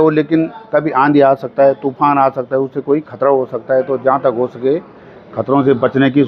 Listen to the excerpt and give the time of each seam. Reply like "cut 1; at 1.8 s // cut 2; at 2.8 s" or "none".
none